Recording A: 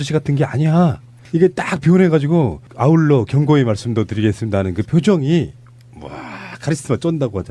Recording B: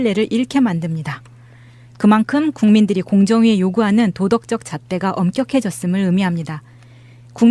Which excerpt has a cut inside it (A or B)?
B